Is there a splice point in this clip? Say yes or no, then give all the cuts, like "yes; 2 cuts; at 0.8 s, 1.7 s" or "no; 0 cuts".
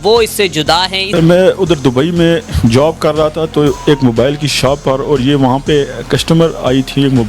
yes; 1 cut; at 1.0 s